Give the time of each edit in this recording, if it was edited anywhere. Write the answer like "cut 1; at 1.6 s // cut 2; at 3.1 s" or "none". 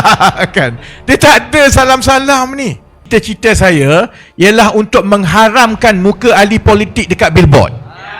cut 1; at 3.0 s